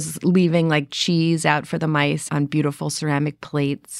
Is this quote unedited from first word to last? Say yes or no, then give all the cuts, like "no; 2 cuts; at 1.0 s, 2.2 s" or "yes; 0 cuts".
no; 1 cut; at 2.2 s